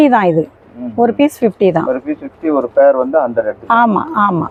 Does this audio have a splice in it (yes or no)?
no